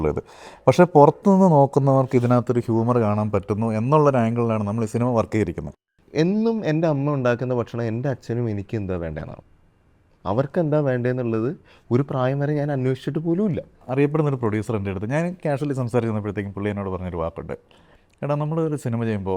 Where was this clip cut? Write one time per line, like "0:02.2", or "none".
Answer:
0:06.0
0:13.8